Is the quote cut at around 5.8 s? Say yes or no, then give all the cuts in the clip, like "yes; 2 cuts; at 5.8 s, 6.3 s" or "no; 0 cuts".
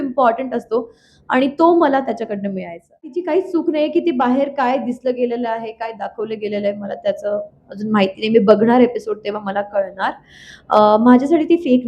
no; 1 cut; at 3.2 s